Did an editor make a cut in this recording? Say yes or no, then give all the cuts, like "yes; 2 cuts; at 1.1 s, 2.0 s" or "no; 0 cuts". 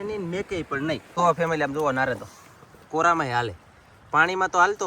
yes; 1 cut; at 1.1 s